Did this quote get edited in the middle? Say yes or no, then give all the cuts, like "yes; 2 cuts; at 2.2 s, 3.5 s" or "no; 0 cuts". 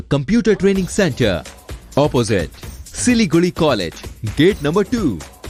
no; 0 cuts